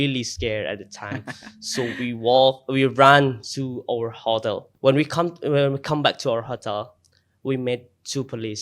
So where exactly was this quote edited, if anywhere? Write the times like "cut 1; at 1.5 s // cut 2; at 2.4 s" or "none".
cut 1; at 4.7 s